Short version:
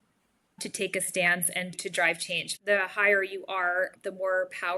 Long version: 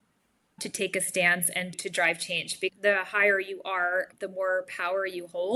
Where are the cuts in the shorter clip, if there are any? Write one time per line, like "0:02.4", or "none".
0:02.6